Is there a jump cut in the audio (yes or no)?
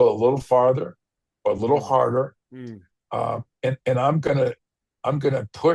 no